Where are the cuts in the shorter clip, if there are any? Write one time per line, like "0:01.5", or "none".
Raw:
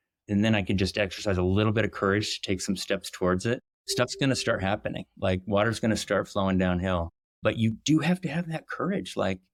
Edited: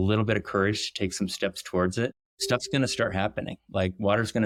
none